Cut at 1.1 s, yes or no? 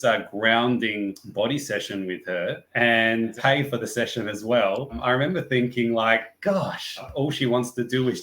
no